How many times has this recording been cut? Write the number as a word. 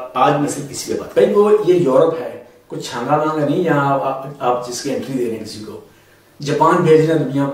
one